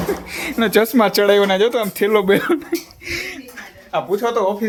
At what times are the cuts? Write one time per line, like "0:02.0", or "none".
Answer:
none